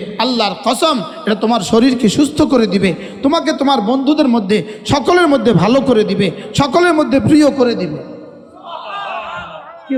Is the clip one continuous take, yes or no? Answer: yes